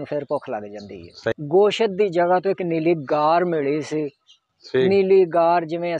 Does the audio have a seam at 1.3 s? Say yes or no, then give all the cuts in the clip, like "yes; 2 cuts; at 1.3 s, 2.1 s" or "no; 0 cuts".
yes; 1 cut; at 1.3 s